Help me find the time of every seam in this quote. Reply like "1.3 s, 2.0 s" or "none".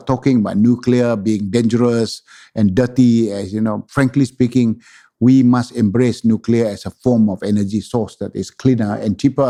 none